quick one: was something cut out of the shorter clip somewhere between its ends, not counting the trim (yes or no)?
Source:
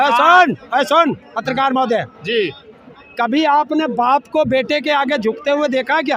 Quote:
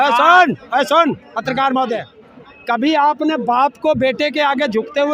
yes